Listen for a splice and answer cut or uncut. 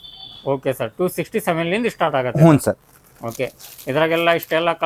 uncut